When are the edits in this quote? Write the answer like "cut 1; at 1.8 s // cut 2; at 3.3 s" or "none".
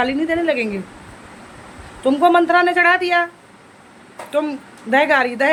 none

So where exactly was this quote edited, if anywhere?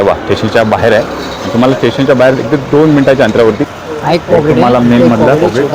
cut 1; at 3.7 s

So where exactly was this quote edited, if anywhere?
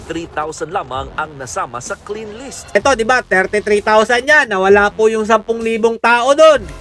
cut 1; at 2.7 s

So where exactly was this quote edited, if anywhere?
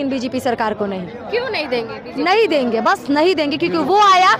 none

